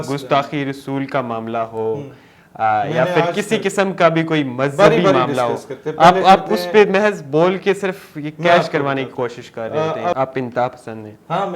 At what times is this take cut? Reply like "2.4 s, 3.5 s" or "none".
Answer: 10.1 s